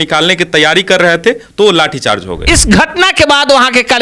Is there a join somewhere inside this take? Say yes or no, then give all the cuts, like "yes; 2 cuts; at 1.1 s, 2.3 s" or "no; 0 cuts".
yes; 1 cut; at 2.3 s